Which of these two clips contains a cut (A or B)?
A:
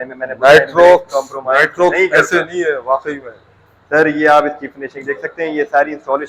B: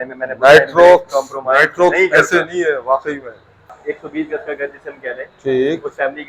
B